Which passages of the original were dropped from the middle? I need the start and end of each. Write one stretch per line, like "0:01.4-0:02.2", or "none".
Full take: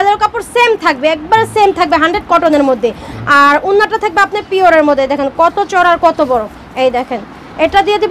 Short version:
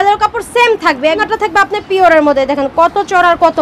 0:01.2-0:03.9